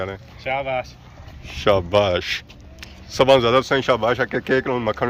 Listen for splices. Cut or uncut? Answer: uncut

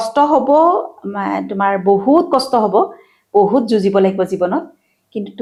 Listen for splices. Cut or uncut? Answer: uncut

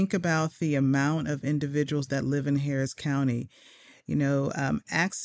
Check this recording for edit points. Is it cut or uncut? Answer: uncut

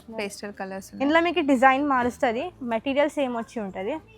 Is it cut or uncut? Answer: uncut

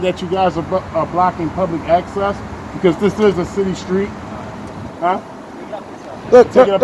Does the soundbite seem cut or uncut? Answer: uncut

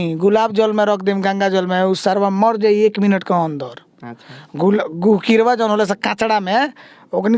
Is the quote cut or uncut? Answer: uncut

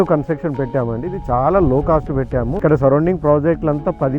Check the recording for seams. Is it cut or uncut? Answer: cut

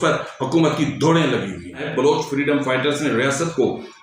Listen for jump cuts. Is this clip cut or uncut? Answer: cut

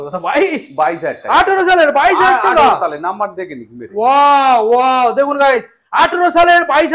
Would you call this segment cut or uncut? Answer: uncut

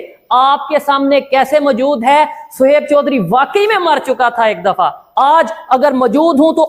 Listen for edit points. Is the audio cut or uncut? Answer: uncut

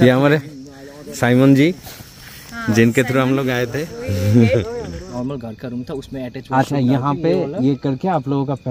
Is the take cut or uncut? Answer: cut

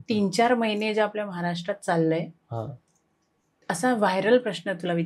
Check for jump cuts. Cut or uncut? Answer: uncut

